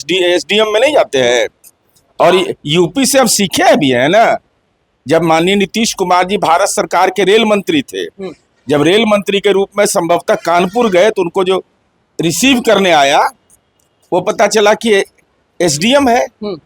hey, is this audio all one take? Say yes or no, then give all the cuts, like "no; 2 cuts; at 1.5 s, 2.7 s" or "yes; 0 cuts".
yes; 0 cuts